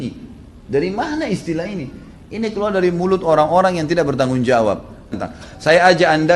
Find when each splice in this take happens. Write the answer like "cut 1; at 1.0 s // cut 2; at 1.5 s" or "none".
cut 1; at 5.1 s

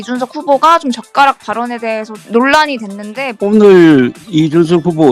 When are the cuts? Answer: cut 1; at 3.3 s

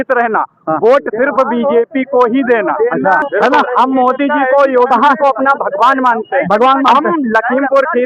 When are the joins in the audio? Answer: none

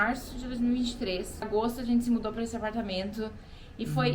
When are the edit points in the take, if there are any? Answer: cut 1; at 1.4 s

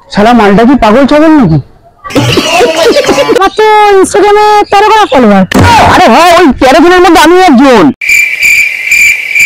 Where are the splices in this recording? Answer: cut 1; at 3.4 s

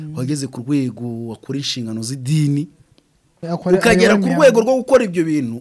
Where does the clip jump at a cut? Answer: cut 1; at 3.4 s

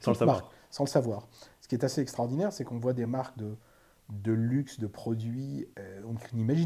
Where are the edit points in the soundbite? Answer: cut 1; at 5.7 s

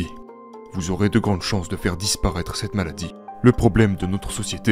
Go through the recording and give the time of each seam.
cut 1; at 3.2 s

